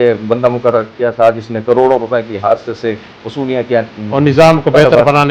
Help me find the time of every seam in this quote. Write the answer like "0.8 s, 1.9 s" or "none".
none